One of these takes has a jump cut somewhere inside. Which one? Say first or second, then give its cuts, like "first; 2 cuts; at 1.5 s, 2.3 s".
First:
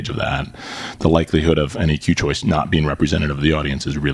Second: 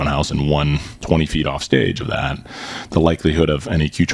second; 1 cut; at 0.9 s